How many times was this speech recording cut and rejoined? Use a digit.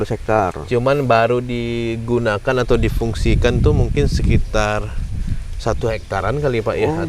0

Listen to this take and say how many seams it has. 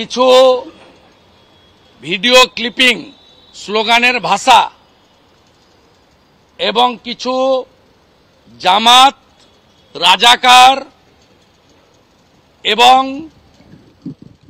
0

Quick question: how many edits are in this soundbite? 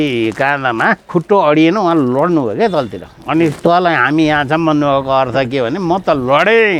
1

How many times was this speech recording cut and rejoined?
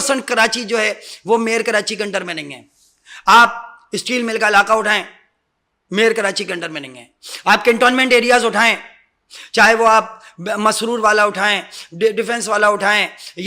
0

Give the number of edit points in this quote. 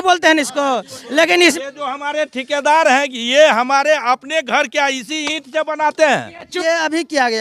2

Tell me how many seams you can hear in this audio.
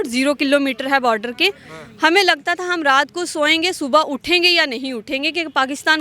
0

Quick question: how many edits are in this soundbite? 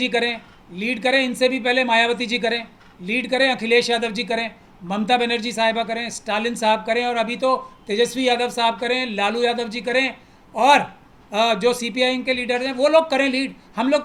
0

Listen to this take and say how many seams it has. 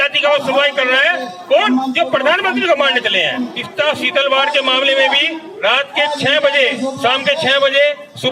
1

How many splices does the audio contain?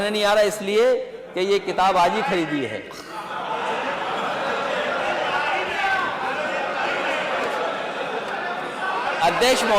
0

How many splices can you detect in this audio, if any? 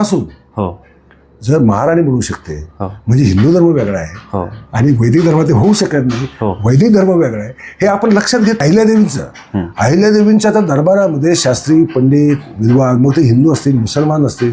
1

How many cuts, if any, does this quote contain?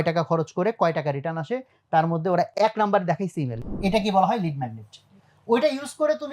2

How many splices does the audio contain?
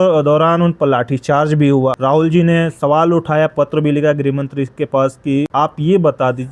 2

